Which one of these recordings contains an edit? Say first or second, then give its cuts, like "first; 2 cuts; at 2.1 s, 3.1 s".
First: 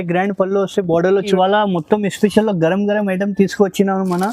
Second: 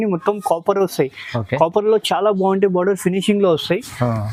first; 1 cut; at 1.3 s